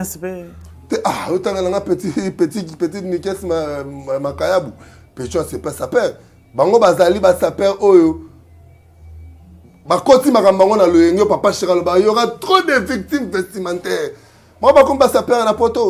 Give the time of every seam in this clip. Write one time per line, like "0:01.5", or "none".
none